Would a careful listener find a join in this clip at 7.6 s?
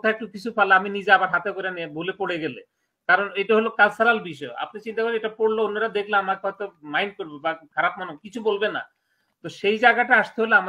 no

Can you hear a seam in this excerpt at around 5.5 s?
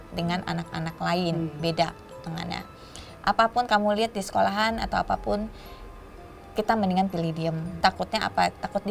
no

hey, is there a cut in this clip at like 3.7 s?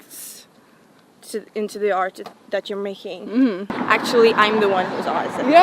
yes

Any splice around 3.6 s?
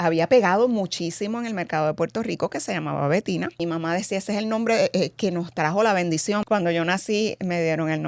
yes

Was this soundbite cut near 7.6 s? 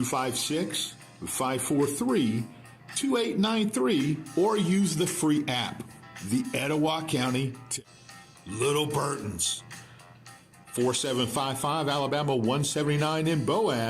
yes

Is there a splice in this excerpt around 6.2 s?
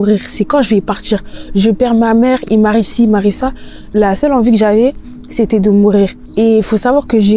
yes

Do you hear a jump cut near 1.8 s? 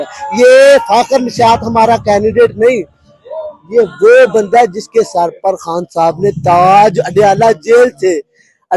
no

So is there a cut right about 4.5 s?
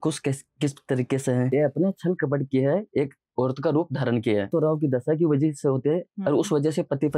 yes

